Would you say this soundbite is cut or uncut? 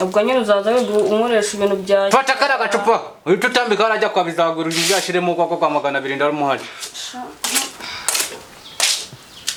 uncut